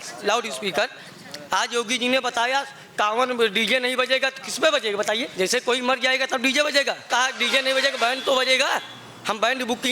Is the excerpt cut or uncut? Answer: cut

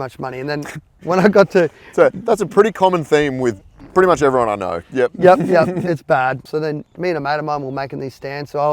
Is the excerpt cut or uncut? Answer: cut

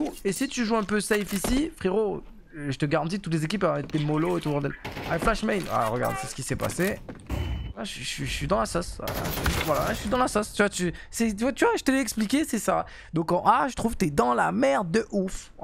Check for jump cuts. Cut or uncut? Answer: cut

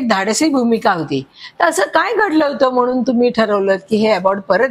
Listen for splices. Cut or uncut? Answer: uncut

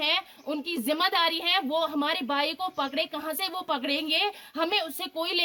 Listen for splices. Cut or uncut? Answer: uncut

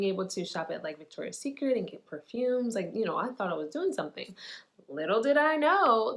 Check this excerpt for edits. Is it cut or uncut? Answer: uncut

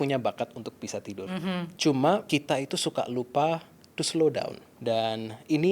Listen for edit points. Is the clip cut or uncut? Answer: cut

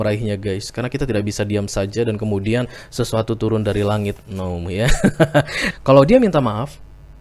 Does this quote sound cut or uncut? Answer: cut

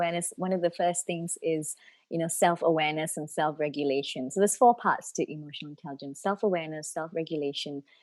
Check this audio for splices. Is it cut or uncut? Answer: uncut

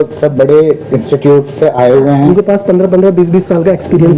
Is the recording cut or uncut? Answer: cut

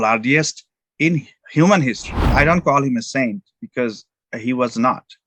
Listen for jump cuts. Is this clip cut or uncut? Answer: cut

